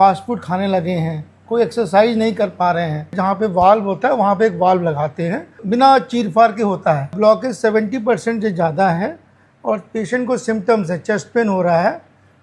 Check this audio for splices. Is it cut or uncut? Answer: cut